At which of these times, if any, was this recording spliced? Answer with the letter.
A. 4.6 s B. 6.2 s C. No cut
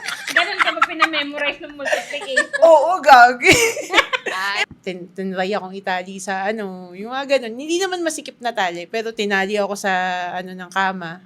A